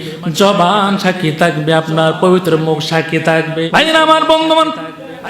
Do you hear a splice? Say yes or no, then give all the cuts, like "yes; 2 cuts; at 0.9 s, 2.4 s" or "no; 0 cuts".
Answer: yes; 1 cut; at 3.7 s